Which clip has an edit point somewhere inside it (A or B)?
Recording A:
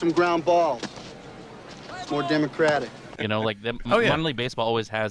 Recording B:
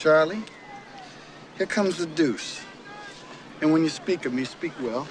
A